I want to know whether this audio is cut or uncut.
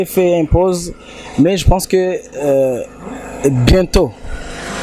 uncut